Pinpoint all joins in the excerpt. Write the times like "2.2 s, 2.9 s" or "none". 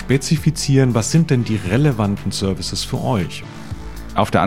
3.5 s